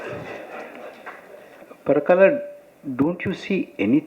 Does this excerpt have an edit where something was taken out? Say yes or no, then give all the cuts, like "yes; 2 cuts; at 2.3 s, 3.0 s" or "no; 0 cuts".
yes; 1 cut; at 1.6 s